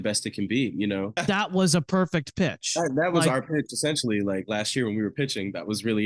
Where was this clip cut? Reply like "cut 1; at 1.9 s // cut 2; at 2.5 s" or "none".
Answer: cut 1; at 1.2 s